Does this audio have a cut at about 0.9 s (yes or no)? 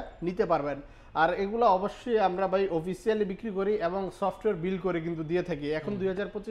no